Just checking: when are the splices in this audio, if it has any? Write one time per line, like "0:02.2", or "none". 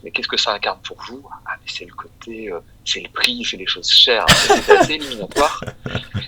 none